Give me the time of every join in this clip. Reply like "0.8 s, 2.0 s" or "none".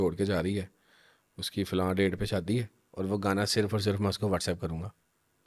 2.8 s